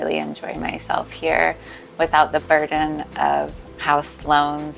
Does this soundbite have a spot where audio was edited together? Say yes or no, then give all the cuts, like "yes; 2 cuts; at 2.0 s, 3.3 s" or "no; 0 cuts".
no; 0 cuts